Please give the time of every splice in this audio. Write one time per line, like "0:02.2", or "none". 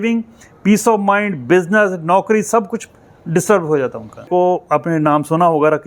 0:04.3